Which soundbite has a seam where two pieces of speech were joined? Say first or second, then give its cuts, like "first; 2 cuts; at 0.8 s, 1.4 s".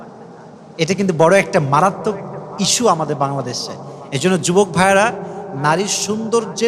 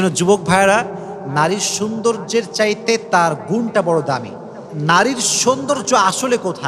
second; 1 cut; at 4.7 s